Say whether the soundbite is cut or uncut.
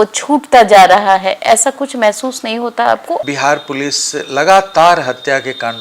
cut